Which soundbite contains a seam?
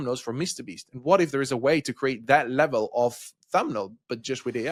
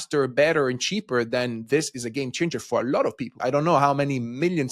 second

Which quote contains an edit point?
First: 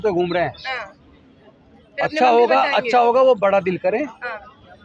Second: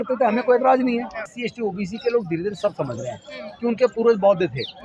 second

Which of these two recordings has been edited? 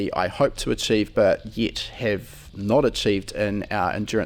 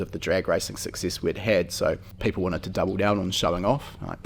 second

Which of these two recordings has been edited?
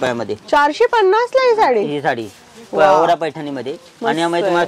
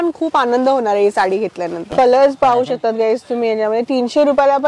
second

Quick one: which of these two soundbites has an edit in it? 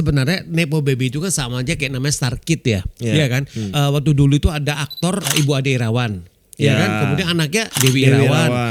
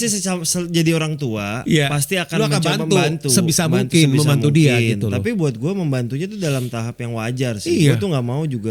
first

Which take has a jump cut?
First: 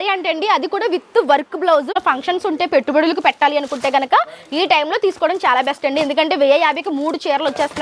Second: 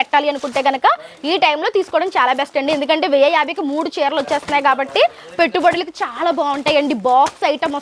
first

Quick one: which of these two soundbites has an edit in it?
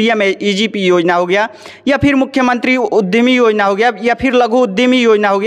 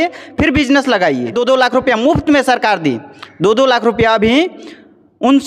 second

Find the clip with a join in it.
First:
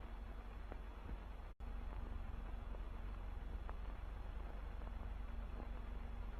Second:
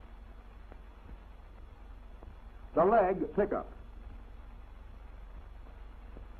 second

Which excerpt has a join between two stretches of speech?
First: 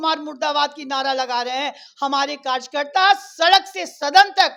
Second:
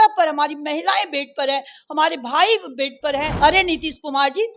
second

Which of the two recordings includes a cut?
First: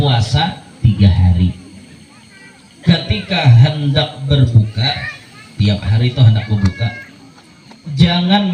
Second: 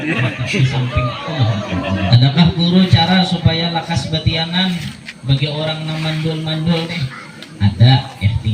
second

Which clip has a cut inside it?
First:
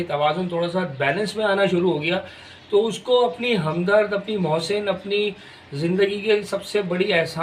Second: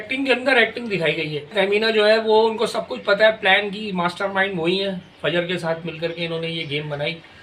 second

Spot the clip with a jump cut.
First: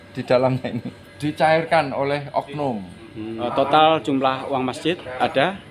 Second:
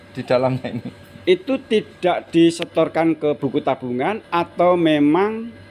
first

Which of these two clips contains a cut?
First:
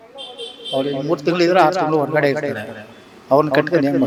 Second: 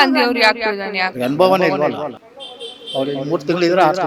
second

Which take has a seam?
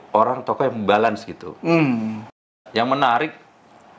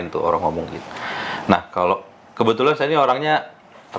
first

